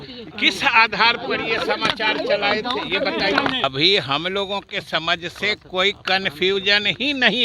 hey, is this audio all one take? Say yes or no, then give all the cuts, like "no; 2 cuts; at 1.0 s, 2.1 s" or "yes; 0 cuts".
no; 1 cut; at 3.6 s